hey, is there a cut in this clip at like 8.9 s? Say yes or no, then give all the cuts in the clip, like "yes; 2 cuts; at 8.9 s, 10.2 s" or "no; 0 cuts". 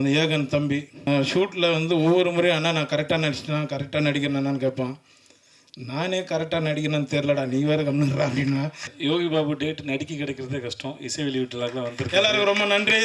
yes; 2 cuts; at 1.1 s, 8.9 s